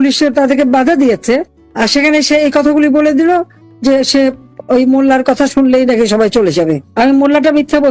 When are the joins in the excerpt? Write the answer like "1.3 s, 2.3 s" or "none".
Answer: 6.8 s